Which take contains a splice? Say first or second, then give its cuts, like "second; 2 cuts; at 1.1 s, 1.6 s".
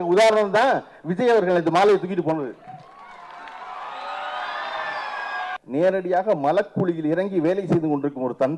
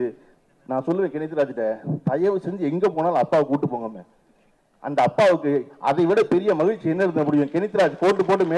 first; 1 cut; at 5.5 s